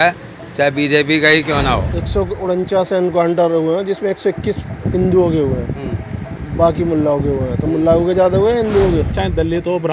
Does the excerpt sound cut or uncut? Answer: cut